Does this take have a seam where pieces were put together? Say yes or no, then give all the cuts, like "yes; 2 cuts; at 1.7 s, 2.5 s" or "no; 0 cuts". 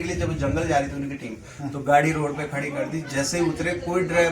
no; 0 cuts